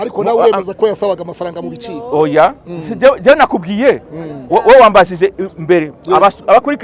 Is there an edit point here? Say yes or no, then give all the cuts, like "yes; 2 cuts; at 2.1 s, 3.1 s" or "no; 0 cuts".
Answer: no; 0 cuts